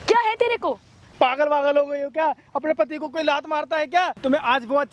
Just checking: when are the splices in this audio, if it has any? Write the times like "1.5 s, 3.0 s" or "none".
1.0 s, 4.1 s